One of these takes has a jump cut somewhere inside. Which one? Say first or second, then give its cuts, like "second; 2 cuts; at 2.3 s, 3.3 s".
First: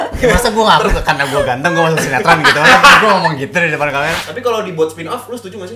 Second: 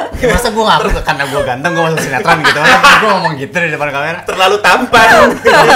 first; 1 cut; at 4.2 s